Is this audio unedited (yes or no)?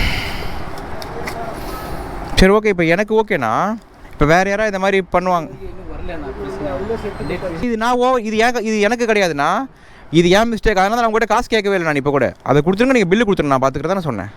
no